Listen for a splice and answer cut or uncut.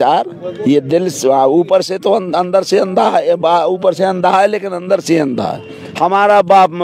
cut